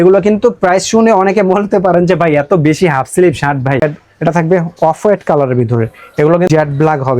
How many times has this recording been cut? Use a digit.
2